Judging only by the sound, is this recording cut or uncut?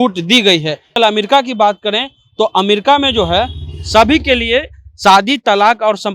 cut